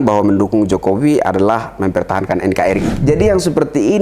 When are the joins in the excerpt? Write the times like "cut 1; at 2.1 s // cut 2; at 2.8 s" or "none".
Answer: cut 1; at 2.9 s

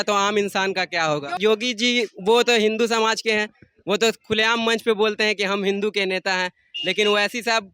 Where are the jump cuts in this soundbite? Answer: cut 1; at 1.4 s

